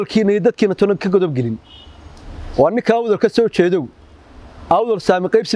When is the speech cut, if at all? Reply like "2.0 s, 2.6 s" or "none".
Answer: none